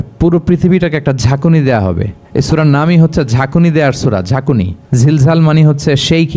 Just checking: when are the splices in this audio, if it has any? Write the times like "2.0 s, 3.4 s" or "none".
2.1 s, 4.8 s